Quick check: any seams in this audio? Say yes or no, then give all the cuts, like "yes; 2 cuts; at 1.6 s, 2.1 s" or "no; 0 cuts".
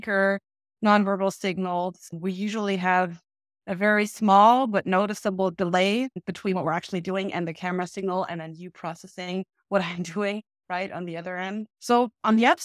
yes; 1 cut; at 11.7 s